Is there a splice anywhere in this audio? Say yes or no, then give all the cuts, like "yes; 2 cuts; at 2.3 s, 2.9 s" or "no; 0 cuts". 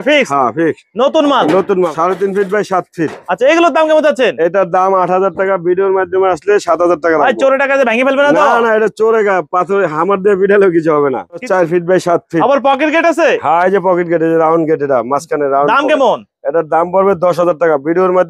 yes; 2 cuts; at 1.8 s, 11.4 s